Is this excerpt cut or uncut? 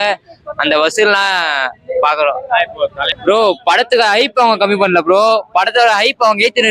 cut